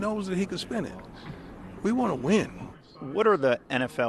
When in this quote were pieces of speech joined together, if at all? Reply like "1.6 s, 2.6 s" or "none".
none